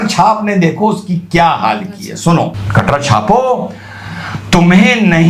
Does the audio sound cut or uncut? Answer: cut